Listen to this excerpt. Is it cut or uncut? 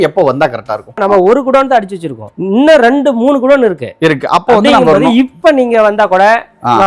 cut